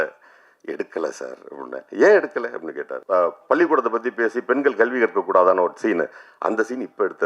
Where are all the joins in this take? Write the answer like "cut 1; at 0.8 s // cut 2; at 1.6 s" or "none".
cut 1; at 2.9 s